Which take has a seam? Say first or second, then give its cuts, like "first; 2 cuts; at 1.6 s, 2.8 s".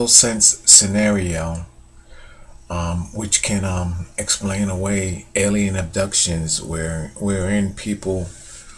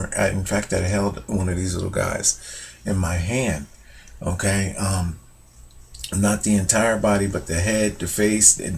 first; 1 cut; at 4.6 s